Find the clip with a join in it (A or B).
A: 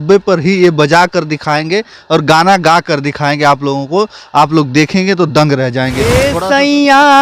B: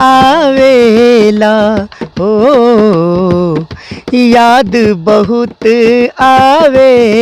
A